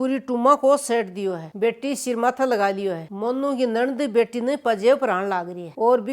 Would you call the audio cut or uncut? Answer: uncut